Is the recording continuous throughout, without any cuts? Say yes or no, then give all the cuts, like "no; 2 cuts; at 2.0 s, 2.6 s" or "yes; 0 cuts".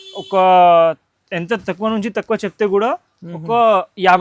yes; 0 cuts